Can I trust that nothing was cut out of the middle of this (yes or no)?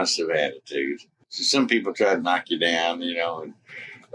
no